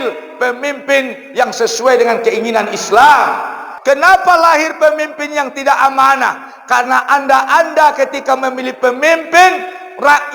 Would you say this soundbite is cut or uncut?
uncut